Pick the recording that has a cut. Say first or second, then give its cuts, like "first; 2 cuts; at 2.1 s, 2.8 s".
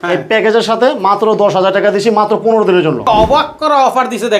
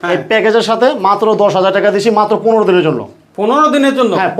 first; 1 cut; at 3.0 s